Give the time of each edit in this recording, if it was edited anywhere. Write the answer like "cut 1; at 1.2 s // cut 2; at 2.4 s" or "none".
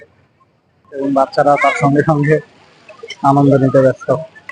cut 1; at 1.0 s

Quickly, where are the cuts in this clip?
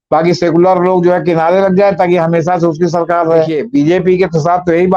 cut 1; at 3.6 s

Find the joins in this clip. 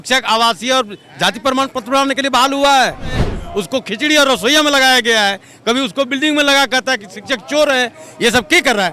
cut 1; at 3.3 s

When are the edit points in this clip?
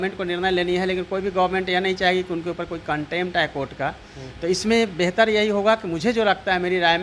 none

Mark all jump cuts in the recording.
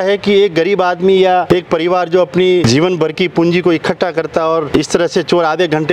cut 1; at 1.5 s // cut 2; at 2.6 s // cut 3; at 4.7 s

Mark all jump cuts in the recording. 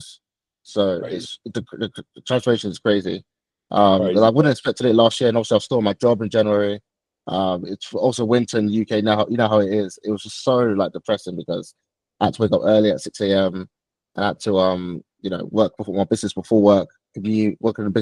none

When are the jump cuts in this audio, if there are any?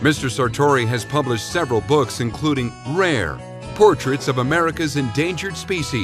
cut 1; at 2.3 s

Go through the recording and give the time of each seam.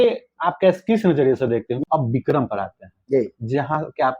cut 1; at 1.7 s

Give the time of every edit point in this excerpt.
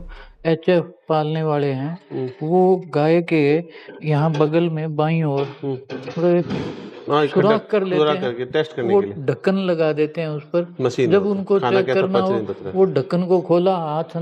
none

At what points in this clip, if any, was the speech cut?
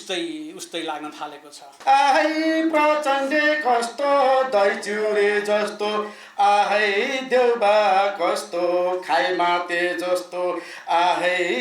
cut 1; at 1.7 s

